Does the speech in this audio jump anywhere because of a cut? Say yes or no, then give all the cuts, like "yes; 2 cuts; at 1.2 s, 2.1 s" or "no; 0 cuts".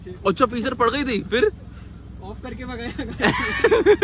no; 0 cuts